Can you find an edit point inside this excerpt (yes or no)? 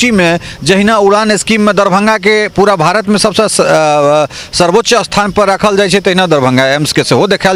no